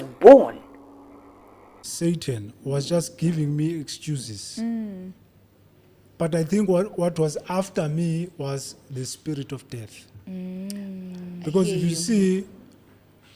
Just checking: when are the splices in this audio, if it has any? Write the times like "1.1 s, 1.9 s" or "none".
1.9 s